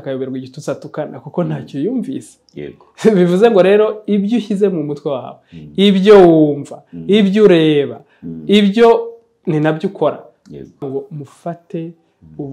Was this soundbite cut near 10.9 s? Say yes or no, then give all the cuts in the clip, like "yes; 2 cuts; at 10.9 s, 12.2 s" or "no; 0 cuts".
yes; 1 cut; at 10.9 s